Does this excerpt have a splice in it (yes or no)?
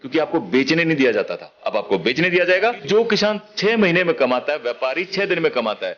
yes